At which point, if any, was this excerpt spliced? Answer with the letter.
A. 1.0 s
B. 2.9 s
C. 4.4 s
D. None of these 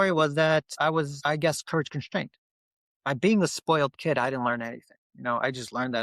A